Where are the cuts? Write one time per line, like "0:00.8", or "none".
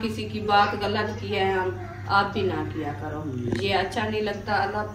none